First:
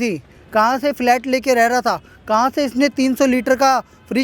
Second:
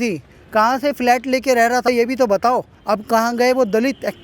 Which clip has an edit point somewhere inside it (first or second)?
second